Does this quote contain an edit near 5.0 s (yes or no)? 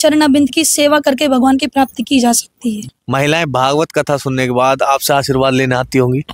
no